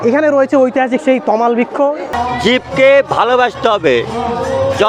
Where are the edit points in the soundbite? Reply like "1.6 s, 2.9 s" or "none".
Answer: 2.0 s